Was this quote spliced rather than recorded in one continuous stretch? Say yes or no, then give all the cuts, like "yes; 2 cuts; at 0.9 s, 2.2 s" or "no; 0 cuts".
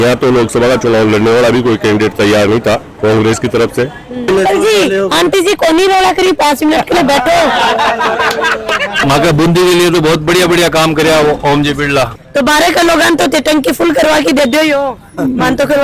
yes; 4 cuts; at 2.9 s, 4.3 s, 9.0 s, 12.2 s